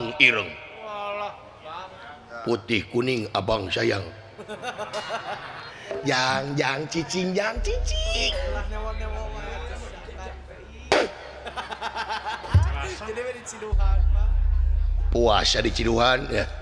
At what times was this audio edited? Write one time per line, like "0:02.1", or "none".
none